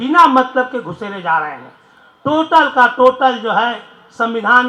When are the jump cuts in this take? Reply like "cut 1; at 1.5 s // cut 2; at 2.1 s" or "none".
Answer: none